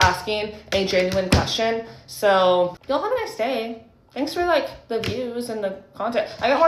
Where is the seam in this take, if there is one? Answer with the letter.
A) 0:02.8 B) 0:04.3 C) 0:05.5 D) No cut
A